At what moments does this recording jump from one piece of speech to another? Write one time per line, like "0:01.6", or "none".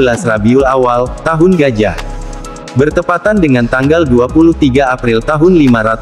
none